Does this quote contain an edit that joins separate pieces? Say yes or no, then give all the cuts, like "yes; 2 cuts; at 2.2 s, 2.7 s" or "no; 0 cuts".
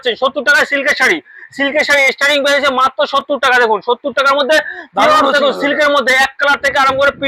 no; 0 cuts